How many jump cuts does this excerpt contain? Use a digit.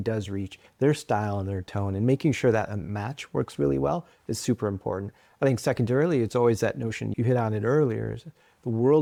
0